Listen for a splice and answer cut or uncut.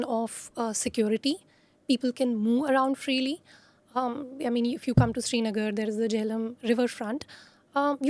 uncut